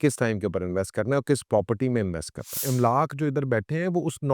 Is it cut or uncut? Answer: cut